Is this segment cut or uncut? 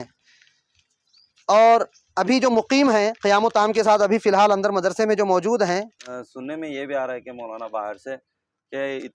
cut